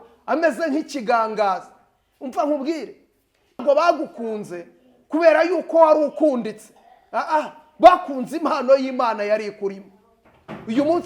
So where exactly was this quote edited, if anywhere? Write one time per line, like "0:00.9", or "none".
0:03.6

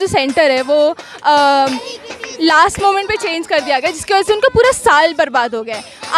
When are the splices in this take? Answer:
none

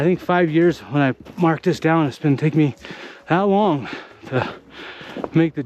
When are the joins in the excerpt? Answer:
none

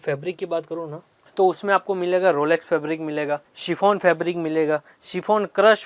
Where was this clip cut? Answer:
0:03.5

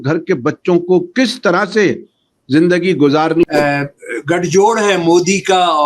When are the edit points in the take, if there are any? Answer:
0:03.4

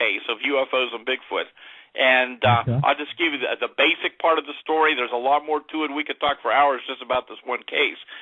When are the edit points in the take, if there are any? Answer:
0:06.6

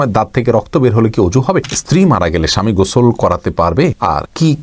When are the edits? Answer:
0:01.8

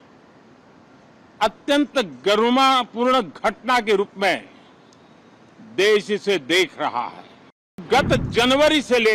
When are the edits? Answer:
0:07.8

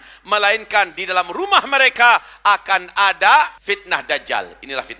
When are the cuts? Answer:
0:03.6

